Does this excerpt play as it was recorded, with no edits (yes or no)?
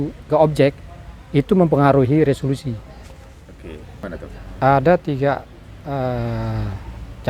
no